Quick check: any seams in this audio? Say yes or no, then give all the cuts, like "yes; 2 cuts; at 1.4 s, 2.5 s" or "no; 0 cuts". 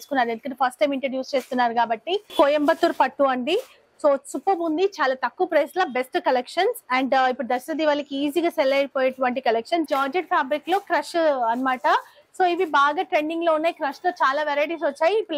yes; 2 cuts; at 2.3 s, 9.9 s